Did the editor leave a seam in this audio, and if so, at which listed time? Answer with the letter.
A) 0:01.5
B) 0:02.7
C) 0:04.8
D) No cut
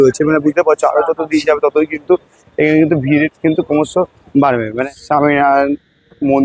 C